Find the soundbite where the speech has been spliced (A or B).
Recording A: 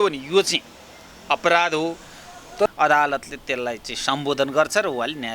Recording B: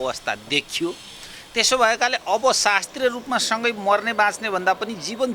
A